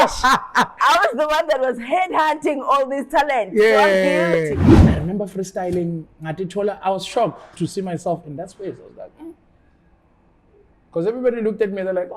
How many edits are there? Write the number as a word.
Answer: one